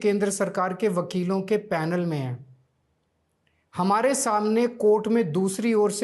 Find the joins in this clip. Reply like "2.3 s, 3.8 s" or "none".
none